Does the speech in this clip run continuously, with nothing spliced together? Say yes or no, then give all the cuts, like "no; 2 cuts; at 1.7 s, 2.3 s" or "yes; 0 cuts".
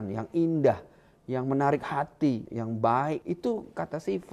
no; 2 cuts; at 2.5 s, 3.2 s